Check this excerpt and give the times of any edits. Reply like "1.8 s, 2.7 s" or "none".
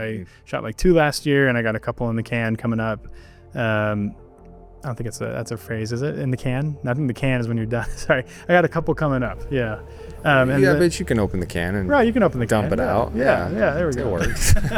none